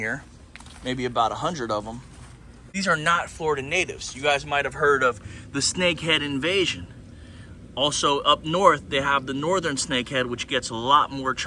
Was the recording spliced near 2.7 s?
yes; 1 cut; at 2.7 s

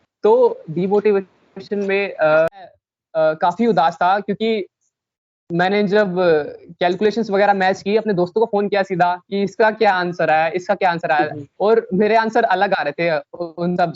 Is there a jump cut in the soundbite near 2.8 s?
yes; 1 cut; at 2.8 s

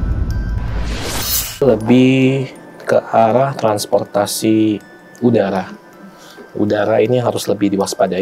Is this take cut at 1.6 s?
yes; 1 cut; at 1.6 s

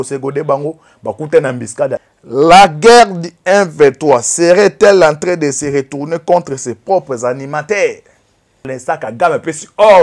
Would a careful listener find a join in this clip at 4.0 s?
no; 2 cuts; at 2.1 s, 8.7 s

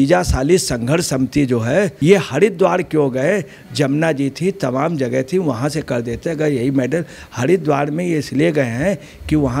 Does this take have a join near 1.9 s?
yes; 1 cut; at 1.9 s

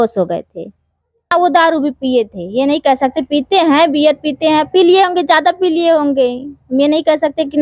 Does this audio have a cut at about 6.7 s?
no; 1 cut; at 1.3 s

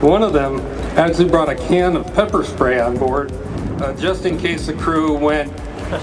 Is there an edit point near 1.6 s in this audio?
no; 0 cuts

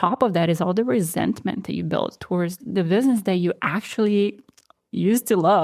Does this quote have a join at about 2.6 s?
yes; 1 cut; at 2.6 s

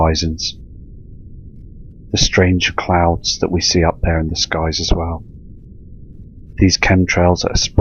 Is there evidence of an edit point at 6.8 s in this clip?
yes; 1 cut; at 6.8 s

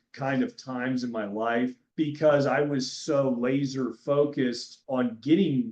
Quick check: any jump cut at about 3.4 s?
no; 2 cuts; at 1.8 s, 4.7 s

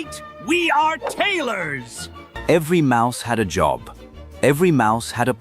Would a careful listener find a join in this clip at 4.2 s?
no; 1 cut; at 2.2 s

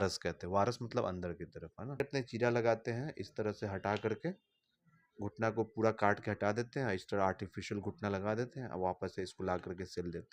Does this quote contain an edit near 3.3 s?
no; 1 cut; at 2.0 s

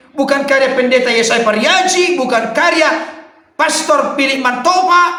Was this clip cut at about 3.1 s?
no; 0 cuts

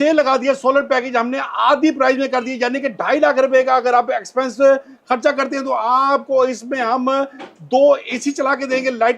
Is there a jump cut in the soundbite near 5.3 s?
no; 0 cuts

